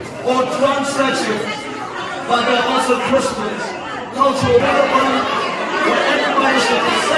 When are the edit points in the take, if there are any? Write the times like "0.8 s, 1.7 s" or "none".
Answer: 4.6 s